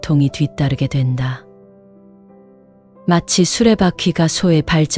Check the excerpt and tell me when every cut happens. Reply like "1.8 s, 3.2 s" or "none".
1.4 s, 2.8 s